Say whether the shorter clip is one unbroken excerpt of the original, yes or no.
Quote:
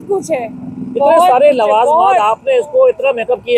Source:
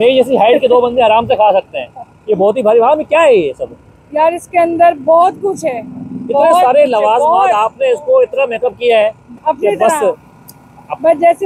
yes